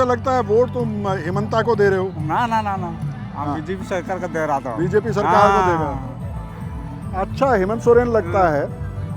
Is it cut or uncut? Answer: uncut